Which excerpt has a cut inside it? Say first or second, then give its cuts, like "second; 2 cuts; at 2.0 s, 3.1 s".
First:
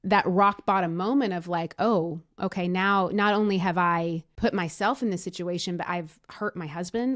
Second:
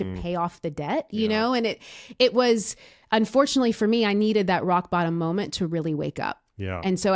first; 1 cut; at 4.3 s